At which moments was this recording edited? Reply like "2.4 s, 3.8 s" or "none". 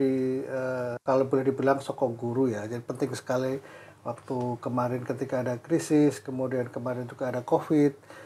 1.0 s